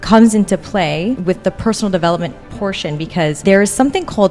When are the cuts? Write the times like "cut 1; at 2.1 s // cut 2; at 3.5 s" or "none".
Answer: cut 1; at 1.2 s // cut 2; at 3.4 s